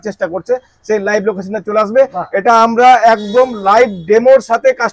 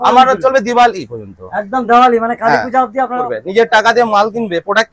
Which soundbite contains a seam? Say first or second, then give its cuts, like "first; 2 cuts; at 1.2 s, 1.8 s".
second; 1 cut; at 3.3 s